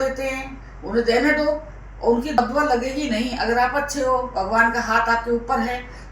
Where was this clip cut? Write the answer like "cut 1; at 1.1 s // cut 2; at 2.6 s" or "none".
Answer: cut 1; at 2.4 s